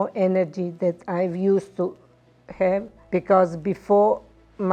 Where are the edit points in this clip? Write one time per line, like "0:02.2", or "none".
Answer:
0:03.0

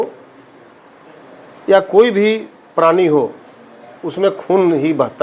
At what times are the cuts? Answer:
none

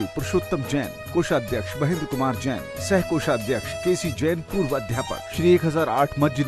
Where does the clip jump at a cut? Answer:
0:03.7
0:05.3

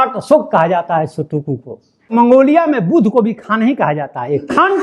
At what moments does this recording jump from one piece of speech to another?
0:02.1

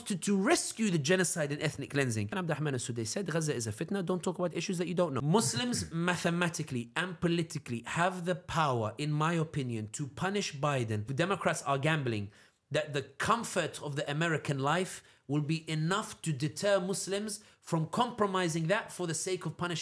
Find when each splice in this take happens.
0:02.3
0:05.2
0:11.1

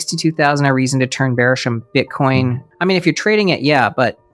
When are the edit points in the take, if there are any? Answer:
0:02.7

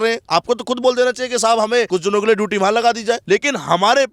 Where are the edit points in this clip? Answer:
0:01.9
0:03.2

